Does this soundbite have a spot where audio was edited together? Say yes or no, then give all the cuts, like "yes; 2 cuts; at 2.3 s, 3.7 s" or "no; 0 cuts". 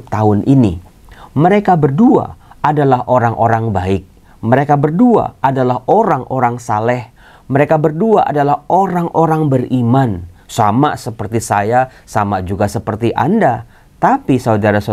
no; 0 cuts